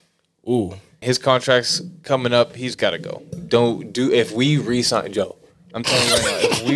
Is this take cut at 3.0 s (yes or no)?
no